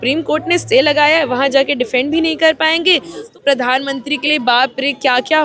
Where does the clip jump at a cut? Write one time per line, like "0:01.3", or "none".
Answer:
0:03.2